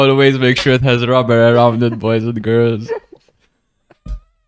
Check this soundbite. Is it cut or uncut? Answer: uncut